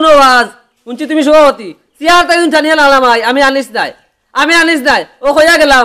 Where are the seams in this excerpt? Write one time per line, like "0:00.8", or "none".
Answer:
none